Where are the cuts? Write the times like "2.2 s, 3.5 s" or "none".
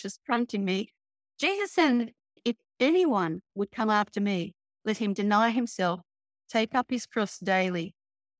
2.4 s